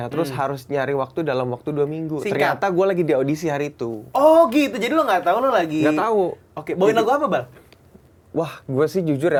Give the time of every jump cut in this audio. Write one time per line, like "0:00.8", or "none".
none